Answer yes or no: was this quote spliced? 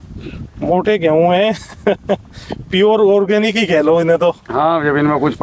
no